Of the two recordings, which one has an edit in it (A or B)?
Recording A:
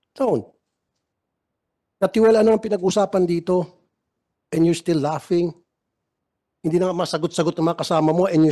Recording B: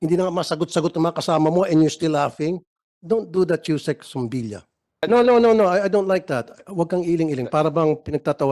B